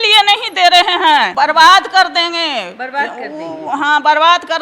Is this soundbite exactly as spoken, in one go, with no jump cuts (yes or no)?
no